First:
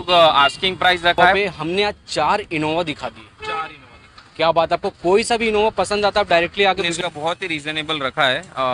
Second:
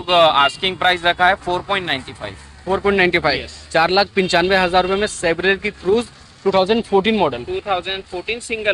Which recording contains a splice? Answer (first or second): first